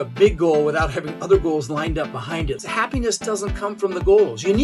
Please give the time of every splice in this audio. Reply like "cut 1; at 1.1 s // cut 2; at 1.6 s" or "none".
cut 1; at 2.6 s